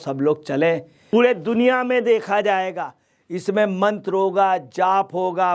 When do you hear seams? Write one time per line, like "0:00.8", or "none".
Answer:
0:01.0